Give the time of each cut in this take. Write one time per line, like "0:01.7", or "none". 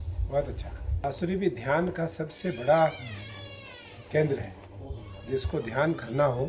0:01.0